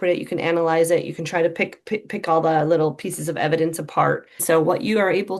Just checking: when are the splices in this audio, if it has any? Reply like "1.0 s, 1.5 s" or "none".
4.4 s

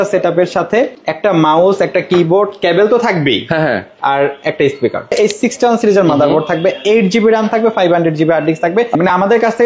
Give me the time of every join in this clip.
1.0 s, 5.2 s, 8.9 s

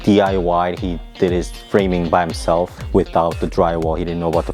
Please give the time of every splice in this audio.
2.8 s

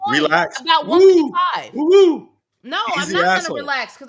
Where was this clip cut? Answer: none

